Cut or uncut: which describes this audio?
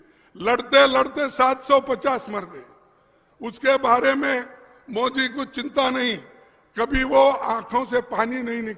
uncut